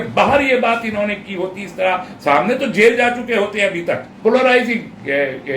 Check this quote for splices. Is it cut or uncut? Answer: cut